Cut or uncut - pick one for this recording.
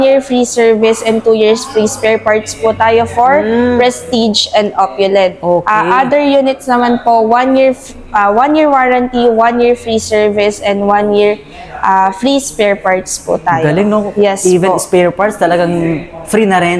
uncut